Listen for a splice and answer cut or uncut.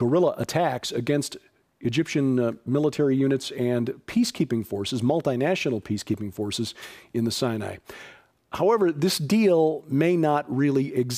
uncut